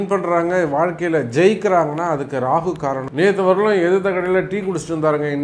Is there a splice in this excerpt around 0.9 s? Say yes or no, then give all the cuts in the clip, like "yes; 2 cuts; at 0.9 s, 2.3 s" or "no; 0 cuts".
no; 1 cut; at 3.0 s